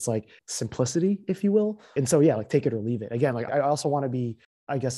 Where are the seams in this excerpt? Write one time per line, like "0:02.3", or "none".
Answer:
0:01.8
0:03.5